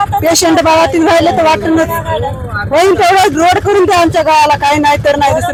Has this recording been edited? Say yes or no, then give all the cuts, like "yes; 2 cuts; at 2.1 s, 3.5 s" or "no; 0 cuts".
no; 0 cuts